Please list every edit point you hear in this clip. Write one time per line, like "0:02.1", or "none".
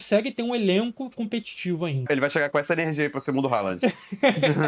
0:02.0